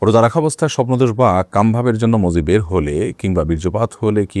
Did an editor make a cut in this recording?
no; 0 cuts

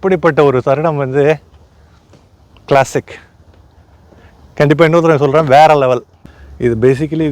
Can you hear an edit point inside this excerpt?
yes; 1 cut; at 6.1 s

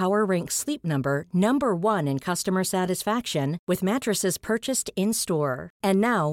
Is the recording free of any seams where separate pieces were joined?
yes; 0 cuts

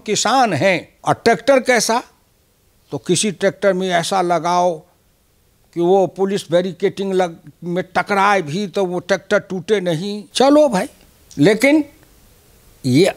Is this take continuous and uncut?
no; 2 cuts; at 0.9 s, 10.2 s

